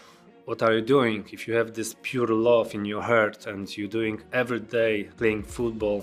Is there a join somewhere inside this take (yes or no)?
no